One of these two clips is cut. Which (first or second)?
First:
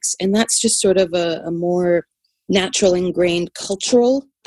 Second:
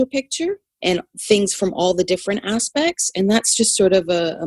second